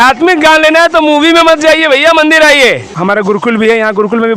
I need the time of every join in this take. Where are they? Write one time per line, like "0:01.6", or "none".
0:02.9